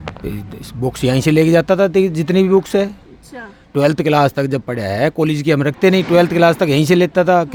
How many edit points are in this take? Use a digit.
0